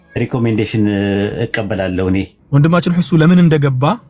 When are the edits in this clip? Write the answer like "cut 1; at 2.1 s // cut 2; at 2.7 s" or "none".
cut 1; at 2.3 s